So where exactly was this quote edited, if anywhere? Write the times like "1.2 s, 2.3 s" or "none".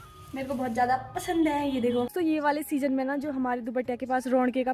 2.1 s